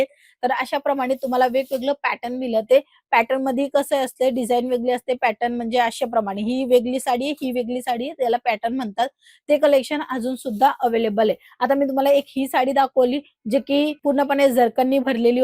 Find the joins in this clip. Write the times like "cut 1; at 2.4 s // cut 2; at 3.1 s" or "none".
none